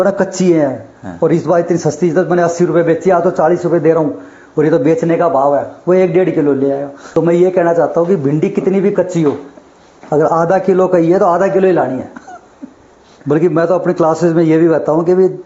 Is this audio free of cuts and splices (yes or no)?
no